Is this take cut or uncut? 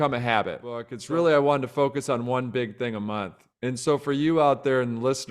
cut